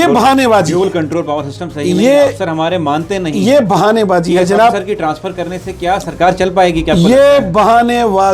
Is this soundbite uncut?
yes; 0 cuts

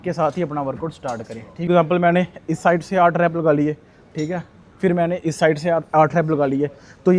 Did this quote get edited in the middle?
yes; 1 cut; at 1.7 s

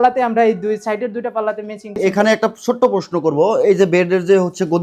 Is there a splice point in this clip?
yes; 1 cut; at 1.9 s

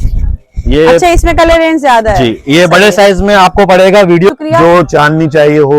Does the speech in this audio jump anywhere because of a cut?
yes; 1 cut; at 4.3 s

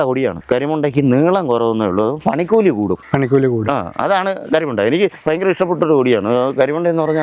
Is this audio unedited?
yes; 0 cuts

